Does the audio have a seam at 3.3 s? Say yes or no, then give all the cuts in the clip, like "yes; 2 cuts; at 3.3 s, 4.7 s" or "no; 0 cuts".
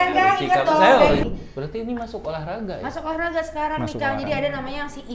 no; 1 cut; at 1.2 s